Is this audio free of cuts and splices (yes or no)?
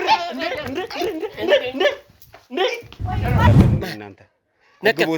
no